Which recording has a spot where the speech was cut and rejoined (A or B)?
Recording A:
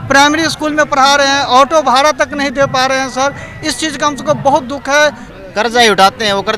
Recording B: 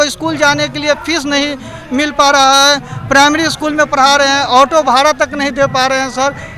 A